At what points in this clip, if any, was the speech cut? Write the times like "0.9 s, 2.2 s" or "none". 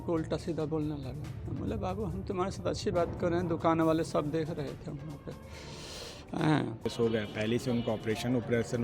6.9 s

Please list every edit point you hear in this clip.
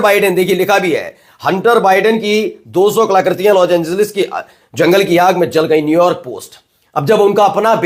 none

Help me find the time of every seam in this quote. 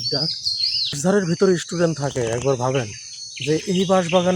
1.0 s

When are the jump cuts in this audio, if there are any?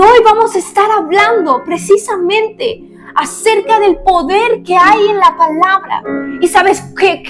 6.2 s

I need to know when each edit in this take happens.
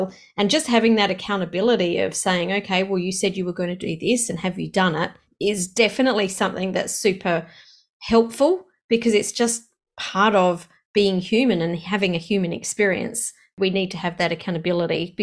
5.2 s, 13.5 s

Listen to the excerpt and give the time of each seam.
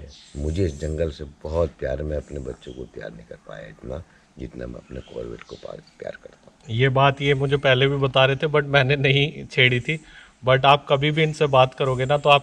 none

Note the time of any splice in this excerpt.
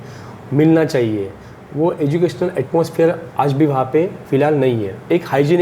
4.2 s

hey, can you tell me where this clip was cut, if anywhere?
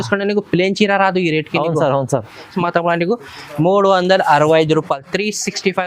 2.5 s

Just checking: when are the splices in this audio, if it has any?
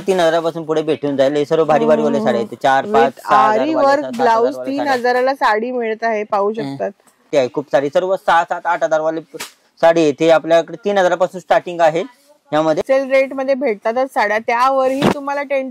7.3 s, 12.8 s

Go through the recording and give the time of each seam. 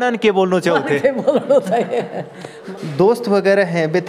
2.7 s

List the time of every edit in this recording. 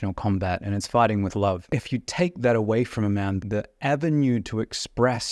1.7 s, 3.4 s

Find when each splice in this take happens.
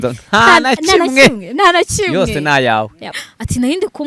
3.2 s

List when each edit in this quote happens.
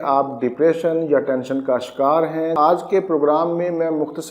2.5 s

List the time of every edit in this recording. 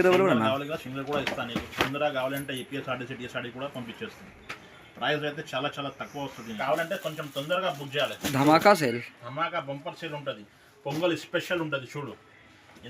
6.5 s

